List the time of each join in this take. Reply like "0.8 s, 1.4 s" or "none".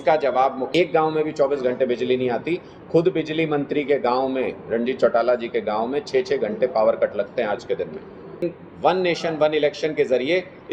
0.7 s, 8.4 s

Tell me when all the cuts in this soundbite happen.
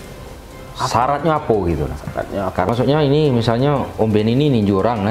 2.7 s

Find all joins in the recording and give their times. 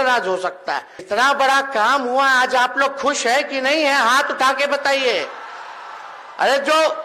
0.9 s

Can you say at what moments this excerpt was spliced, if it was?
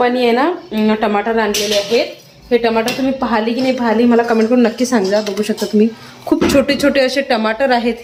none

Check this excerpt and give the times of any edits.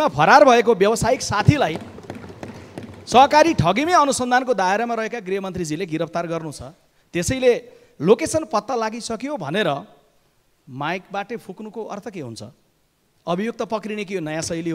none

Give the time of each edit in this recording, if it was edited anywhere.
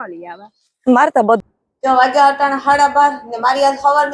1.4 s

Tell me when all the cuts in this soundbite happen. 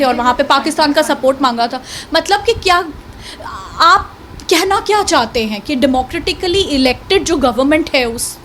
none

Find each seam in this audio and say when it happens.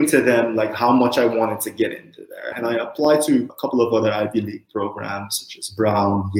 2.5 s, 3.5 s

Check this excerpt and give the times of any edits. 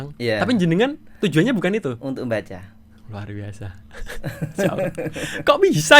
none

